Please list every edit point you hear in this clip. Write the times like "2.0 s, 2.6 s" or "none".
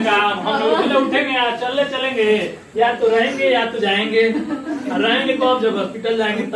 none